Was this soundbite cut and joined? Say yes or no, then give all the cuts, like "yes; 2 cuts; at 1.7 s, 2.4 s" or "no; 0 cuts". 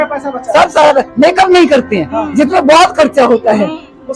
no; 0 cuts